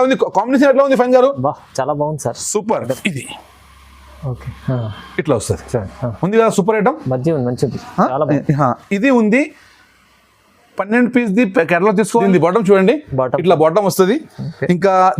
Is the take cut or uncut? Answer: cut